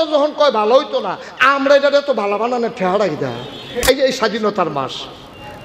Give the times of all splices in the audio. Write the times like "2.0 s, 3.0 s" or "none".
3.8 s